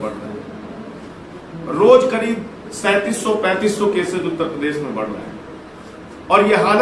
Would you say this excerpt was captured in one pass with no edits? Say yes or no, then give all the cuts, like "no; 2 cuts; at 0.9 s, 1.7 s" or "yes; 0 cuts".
yes; 0 cuts